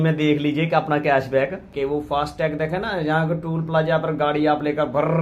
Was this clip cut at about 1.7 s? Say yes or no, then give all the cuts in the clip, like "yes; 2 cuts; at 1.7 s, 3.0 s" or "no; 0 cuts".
yes; 1 cut; at 1.7 s